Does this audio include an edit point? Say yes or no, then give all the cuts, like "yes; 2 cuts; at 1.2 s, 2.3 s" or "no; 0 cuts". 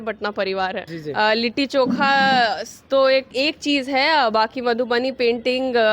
yes; 2 cuts; at 1.0 s, 3.3 s